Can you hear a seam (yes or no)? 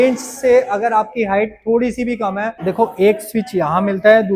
yes